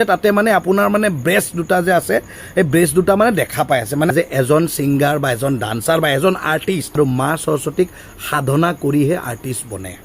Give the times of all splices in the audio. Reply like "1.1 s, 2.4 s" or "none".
4.1 s, 6.9 s